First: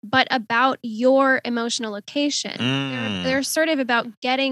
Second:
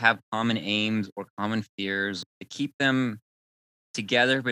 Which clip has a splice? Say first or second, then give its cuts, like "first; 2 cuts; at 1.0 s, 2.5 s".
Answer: second; 1 cut; at 2.3 s